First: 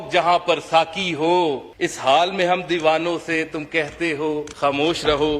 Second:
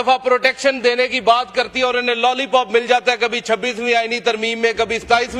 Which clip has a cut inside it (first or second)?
first